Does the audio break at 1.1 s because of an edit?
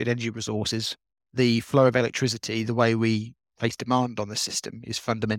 yes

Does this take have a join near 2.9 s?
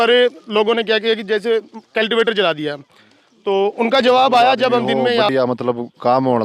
no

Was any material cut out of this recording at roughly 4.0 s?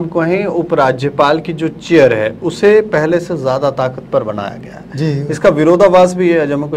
no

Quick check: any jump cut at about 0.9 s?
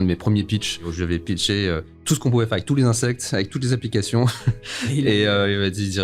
yes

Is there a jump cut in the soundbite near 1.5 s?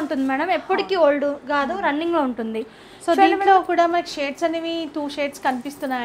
no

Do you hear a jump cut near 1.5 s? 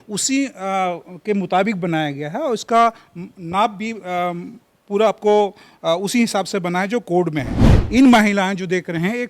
no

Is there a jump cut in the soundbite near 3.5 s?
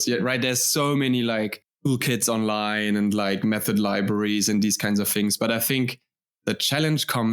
no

